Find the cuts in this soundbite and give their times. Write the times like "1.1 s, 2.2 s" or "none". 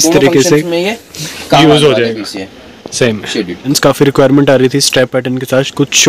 3.7 s